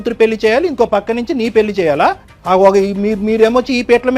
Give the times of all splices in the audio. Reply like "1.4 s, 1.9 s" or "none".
2.3 s